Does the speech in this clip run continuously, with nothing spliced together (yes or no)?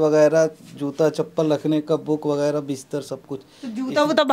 yes